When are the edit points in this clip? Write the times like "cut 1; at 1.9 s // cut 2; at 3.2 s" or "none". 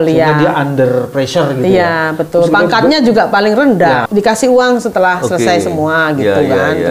cut 1; at 4.0 s